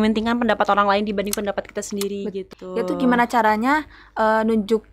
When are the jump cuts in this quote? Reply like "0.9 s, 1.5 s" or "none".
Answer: 2.4 s